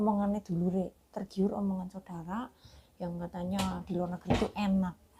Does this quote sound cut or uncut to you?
uncut